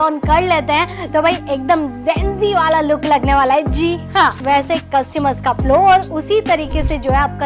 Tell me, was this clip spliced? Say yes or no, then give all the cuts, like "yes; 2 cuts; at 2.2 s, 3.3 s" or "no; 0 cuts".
yes; 1 cut; at 4.4 s